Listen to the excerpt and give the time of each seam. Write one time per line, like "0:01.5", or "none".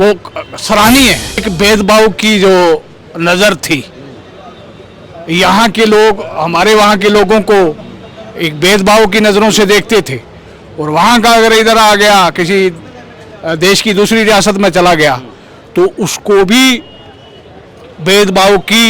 0:01.4